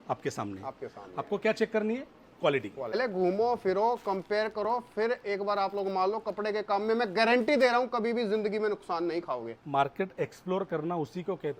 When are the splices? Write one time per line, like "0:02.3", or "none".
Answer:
0:02.9